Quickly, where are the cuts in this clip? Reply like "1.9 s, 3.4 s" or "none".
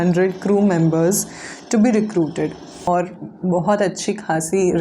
2.9 s